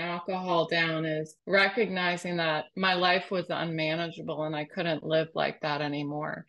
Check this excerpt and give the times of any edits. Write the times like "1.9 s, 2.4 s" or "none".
1.3 s